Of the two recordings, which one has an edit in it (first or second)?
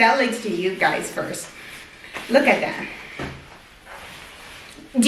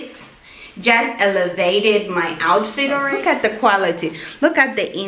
second